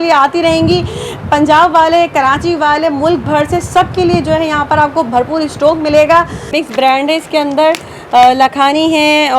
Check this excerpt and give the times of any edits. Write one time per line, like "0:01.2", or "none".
0:06.5